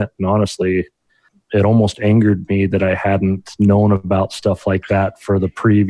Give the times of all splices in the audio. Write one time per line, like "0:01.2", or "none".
0:01.3